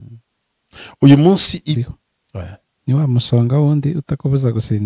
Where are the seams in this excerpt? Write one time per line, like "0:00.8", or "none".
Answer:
0:01.8